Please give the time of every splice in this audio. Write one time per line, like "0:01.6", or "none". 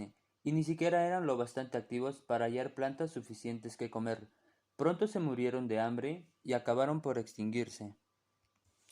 0:03.7